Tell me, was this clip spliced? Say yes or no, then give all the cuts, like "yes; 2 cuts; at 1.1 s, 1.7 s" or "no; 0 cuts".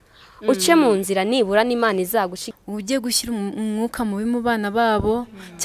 yes; 1 cut; at 2.5 s